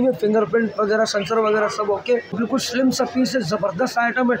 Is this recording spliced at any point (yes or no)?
yes